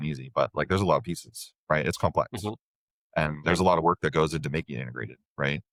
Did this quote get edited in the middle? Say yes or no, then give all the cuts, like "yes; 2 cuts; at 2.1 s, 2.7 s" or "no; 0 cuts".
no; 0 cuts